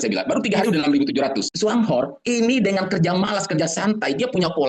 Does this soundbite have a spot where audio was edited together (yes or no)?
yes